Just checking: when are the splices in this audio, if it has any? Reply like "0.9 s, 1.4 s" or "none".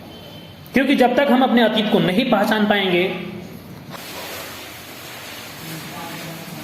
3.8 s